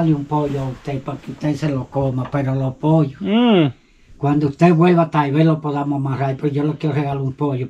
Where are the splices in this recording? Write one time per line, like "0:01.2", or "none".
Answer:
none